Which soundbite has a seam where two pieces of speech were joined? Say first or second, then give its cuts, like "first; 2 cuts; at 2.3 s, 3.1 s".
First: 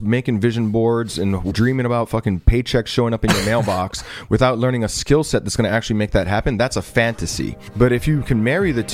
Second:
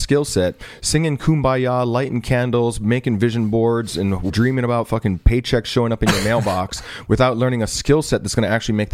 first; 1 cut; at 7.6 s